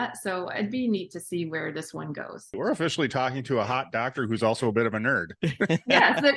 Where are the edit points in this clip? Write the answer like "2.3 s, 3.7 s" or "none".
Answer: 2.6 s